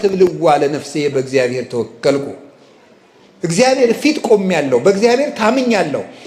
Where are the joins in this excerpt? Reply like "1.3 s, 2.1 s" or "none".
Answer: none